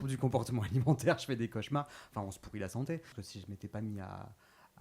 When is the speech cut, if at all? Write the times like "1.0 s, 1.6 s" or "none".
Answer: 3.2 s

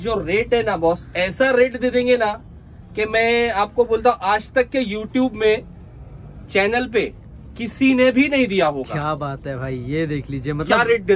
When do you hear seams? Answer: none

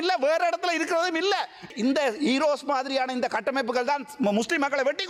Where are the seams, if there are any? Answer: 1.7 s

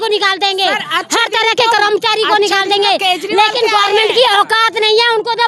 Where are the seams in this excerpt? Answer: none

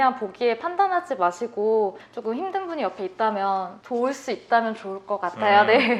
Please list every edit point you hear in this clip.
none

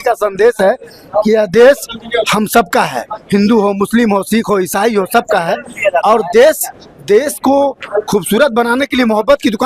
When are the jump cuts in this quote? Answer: none

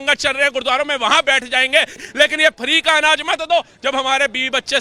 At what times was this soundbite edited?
1.9 s

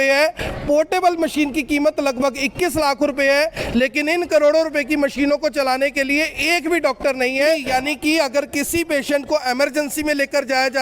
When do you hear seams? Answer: 7.6 s

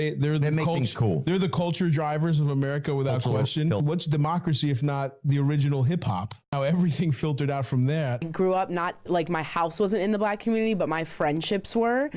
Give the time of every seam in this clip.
3.8 s, 8.3 s

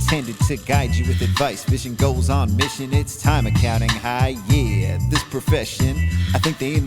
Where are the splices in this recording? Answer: none

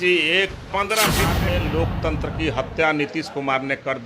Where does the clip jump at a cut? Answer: 1.4 s

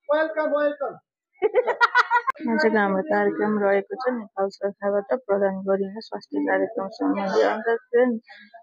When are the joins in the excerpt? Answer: 2.3 s

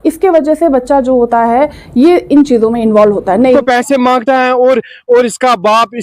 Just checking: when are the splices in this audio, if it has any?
3.6 s

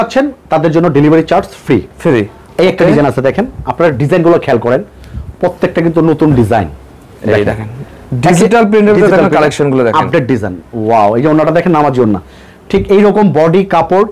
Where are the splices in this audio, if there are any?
none

